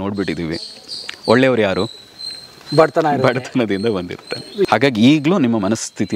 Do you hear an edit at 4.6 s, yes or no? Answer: yes